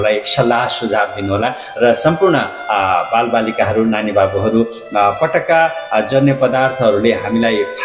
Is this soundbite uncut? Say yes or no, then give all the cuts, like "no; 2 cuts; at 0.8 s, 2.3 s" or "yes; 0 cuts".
yes; 0 cuts